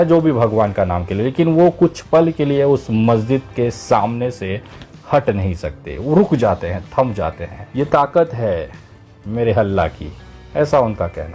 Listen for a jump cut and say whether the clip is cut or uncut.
uncut